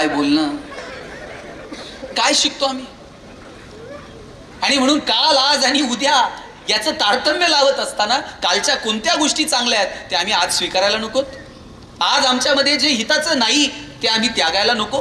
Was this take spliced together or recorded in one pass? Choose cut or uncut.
uncut